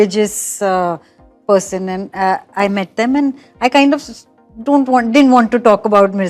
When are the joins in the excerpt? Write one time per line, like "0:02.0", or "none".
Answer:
none